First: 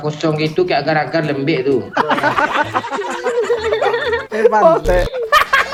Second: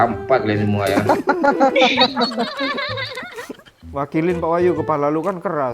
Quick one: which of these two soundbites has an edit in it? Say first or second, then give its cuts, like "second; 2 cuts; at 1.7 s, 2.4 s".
second; 1 cut; at 3.7 s